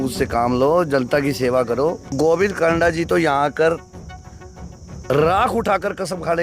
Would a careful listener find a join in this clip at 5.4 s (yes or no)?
no